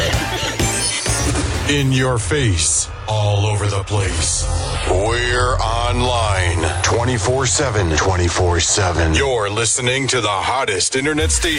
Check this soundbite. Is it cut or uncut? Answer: cut